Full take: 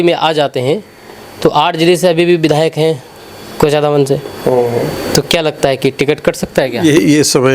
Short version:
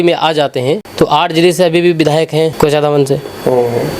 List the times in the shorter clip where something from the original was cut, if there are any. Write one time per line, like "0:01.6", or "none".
0:00.9
0:02.5